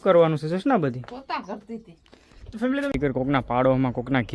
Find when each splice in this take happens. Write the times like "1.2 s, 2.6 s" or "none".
2.9 s